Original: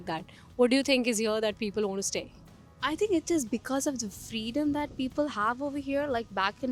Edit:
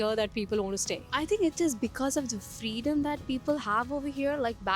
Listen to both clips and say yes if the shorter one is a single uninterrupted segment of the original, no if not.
no